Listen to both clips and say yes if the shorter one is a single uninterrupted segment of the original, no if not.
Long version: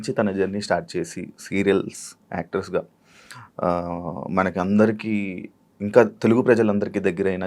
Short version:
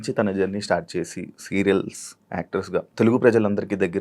no